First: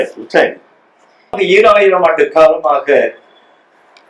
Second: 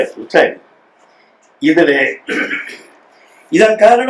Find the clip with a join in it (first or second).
first